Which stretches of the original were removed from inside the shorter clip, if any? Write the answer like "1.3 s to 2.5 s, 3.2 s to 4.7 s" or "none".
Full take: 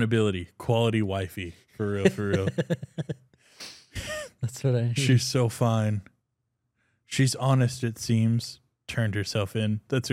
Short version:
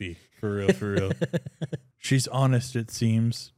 3.2 s to 6.9 s